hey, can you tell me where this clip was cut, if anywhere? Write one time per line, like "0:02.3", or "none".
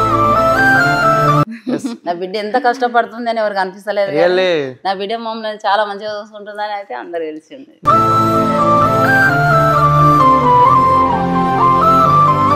none